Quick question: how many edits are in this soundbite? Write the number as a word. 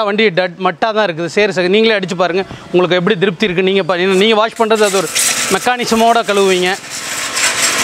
zero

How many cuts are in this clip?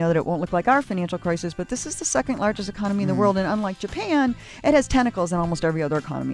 zero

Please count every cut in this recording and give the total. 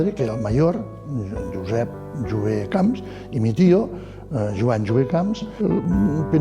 one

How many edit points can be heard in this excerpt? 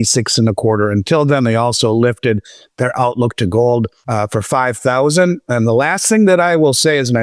one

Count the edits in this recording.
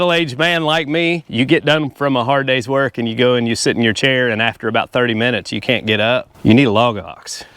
two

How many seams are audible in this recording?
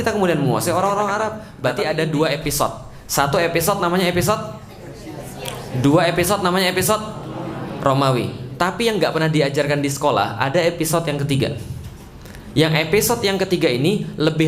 one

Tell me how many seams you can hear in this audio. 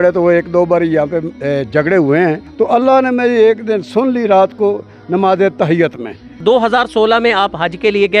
two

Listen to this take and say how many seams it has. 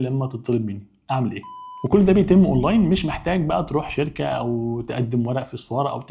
one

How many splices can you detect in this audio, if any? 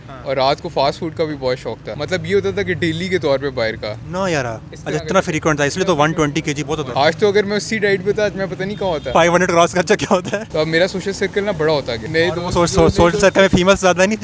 five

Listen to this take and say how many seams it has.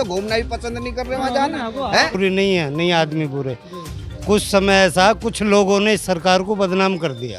one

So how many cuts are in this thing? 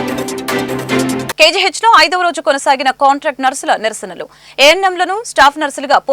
one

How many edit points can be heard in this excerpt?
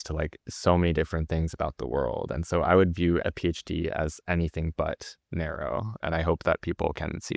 one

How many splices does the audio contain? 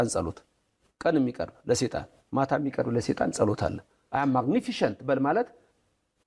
one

